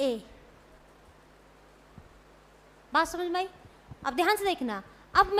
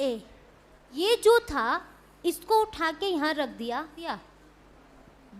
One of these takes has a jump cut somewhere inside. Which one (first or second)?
second